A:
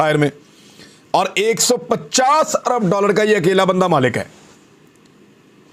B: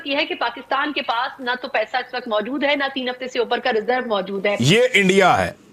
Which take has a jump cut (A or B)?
B